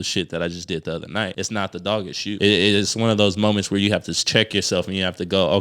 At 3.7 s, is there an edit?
no; 2 cuts; at 1.4 s, 2.4 s

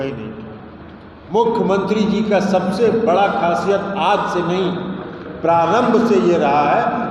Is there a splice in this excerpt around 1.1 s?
yes; 1 cut; at 1.1 s

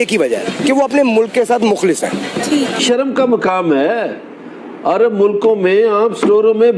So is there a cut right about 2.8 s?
yes; 1 cut; at 2.8 s

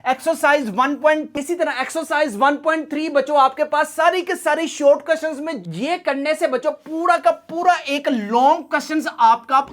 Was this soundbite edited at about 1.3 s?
yes; 2 cuts; at 1.3 s, 5.6 s

